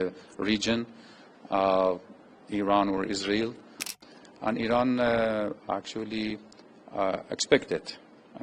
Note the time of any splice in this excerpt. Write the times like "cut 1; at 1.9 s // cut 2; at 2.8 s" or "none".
cut 1; at 3.8 s